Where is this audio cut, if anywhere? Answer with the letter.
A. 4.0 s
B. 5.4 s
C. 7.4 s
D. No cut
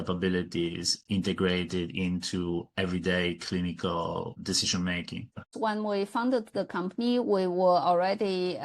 B